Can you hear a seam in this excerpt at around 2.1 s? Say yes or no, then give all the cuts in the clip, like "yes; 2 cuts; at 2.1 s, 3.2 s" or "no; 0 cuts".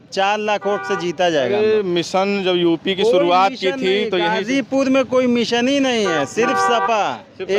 no; 0 cuts